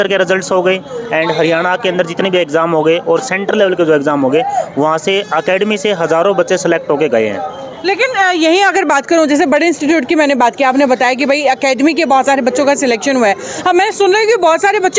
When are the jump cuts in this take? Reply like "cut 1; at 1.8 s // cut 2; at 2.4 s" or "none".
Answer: none